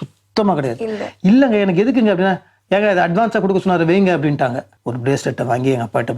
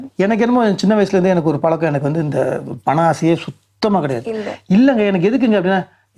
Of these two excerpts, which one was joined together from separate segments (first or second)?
first